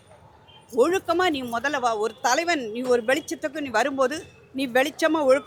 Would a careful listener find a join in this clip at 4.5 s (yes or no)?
no